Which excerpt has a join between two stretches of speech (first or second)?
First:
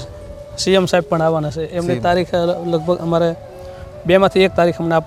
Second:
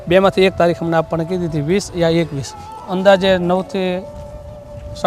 second